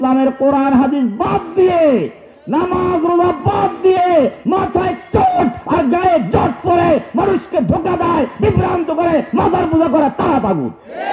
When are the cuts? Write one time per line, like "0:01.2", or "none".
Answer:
none